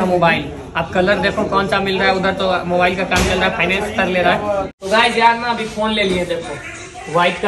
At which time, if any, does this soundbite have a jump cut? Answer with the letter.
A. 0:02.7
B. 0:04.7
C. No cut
B